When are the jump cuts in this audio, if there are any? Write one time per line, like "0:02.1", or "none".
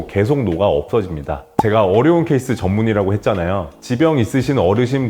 0:01.4